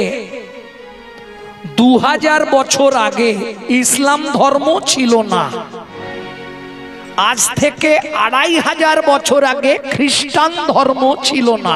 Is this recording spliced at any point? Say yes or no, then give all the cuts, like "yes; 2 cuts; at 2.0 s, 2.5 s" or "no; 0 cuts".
no; 0 cuts